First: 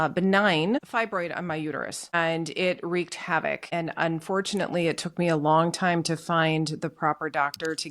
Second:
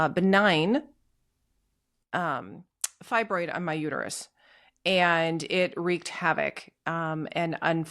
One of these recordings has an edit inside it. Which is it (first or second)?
first